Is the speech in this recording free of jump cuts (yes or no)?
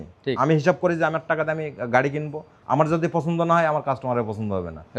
yes